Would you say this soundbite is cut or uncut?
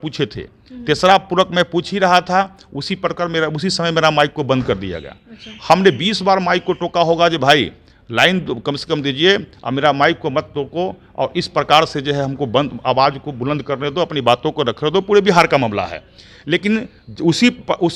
uncut